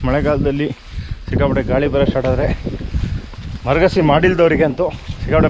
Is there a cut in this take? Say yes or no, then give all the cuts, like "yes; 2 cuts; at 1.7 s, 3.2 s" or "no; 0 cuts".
no; 0 cuts